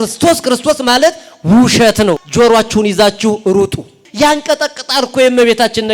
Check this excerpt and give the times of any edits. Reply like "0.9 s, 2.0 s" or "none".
2.2 s, 4.0 s